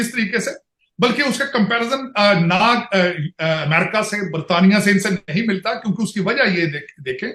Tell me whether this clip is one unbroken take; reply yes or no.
yes